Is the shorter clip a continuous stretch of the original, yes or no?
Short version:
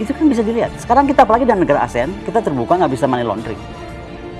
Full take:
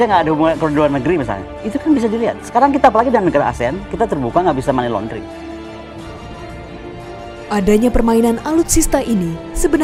no